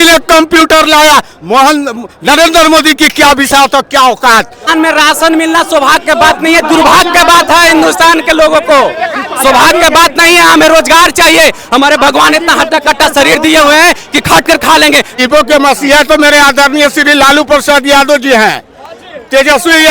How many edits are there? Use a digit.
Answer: 2